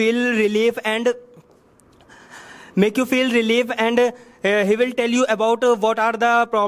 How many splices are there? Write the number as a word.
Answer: zero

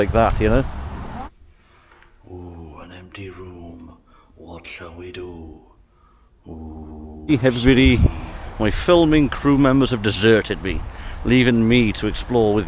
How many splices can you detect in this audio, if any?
two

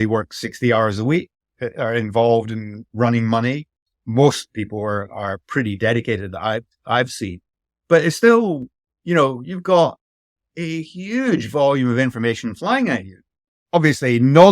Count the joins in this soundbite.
one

